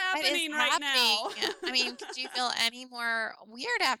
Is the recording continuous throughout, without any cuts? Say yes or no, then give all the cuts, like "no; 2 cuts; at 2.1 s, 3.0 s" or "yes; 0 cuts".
yes; 0 cuts